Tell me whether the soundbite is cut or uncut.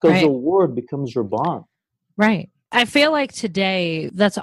uncut